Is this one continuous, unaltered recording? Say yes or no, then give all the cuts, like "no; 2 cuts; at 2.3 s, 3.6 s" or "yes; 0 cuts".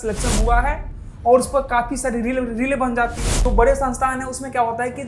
no; 1 cut; at 3.4 s